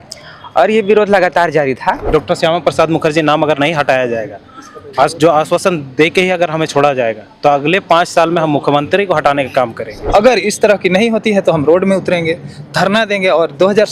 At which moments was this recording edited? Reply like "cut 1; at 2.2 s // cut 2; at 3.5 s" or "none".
cut 1; at 2.0 s // cut 2; at 10.0 s